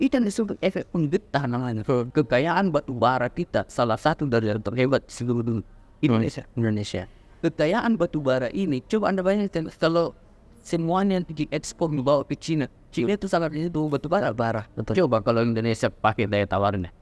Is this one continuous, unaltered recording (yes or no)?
no